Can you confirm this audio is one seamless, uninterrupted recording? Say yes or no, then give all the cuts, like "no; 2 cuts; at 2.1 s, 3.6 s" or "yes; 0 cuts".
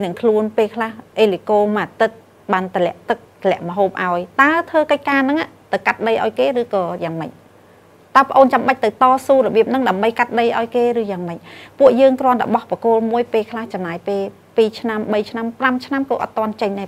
yes; 0 cuts